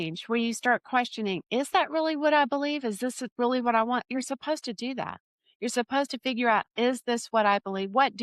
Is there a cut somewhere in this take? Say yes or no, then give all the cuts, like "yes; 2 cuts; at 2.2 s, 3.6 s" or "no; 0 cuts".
no; 0 cuts